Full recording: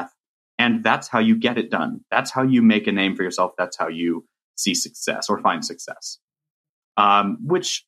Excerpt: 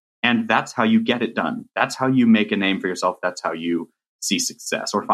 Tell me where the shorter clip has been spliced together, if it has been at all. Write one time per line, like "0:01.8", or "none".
none